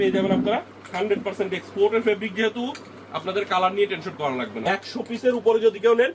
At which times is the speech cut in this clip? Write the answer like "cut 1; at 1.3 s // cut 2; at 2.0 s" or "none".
cut 1; at 4.6 s